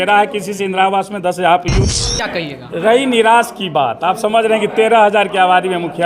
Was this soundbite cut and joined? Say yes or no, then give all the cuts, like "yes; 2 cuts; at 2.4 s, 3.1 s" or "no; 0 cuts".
yes; 1 cut; at 2.3 s